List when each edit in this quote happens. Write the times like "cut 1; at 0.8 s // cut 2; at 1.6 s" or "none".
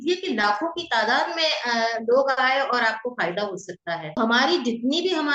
cut 1; at 4.2 s